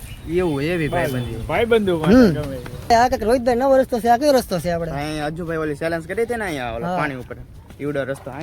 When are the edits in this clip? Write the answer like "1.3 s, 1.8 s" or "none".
2.7 s